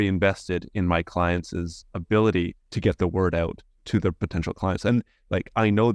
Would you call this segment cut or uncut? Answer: uncut